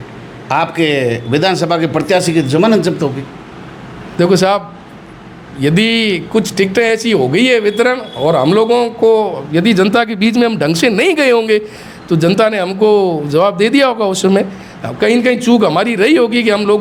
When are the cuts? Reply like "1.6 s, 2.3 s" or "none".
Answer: none